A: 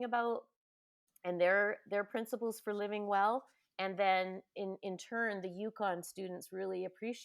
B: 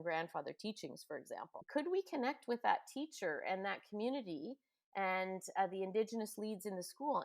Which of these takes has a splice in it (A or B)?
B